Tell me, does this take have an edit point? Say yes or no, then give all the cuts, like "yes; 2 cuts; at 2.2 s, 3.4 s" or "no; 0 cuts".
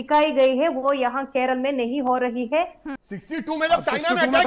yes; 1 cut; at 2.9 s